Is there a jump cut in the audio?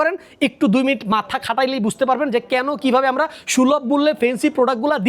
no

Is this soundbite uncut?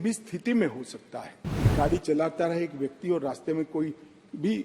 no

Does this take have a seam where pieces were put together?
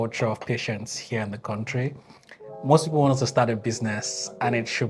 no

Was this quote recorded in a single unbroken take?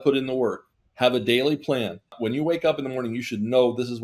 no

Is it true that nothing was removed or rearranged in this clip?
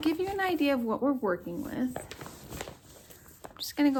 yes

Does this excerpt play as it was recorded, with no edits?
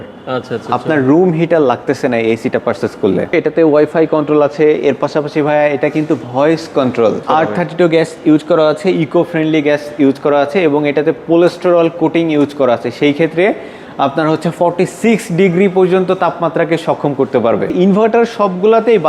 no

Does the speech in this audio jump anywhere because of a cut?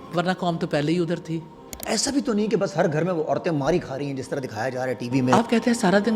yes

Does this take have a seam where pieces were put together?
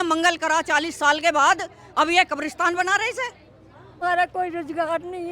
yes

